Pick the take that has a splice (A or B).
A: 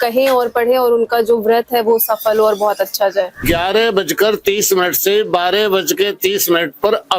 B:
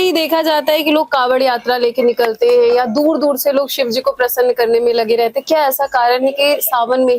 A